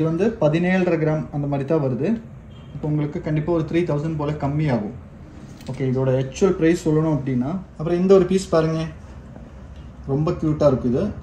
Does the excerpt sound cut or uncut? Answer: cut